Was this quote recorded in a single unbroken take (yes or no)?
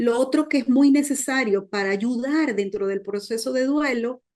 yes